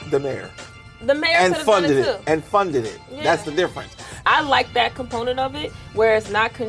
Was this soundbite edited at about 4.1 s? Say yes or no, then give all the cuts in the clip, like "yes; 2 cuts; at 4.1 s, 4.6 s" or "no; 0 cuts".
yes; 1 cut; at 4.1 s